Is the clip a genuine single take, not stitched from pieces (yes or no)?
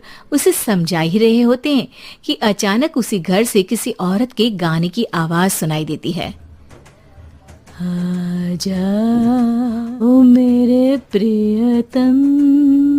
no